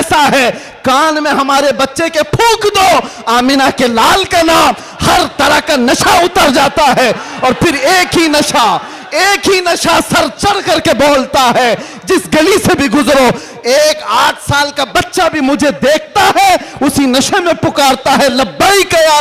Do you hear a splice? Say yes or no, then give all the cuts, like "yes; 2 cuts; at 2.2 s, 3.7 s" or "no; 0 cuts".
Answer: no; 0 cuts